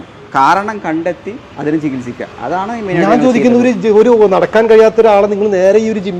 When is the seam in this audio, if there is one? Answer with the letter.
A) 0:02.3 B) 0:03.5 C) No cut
C